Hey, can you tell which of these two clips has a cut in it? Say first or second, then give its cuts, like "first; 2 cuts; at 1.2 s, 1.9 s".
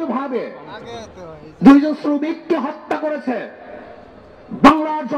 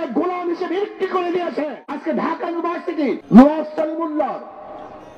second; 2 cuts; at 2.0 s, 3.2 s